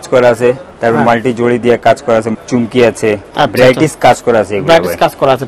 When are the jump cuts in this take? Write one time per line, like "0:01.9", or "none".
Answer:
0:02.3
0:03.3